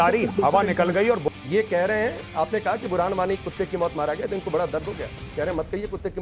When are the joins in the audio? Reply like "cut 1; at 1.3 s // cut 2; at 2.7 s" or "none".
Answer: cut 1; at 1.2 s